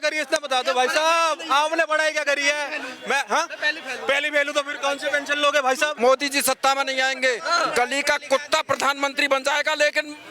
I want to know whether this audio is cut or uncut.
cut